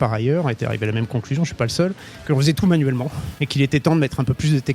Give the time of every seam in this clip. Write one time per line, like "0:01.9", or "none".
0:02.1